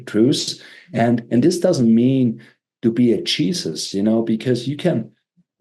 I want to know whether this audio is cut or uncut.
uncut